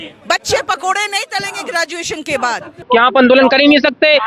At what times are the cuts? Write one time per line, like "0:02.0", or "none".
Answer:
0:02.7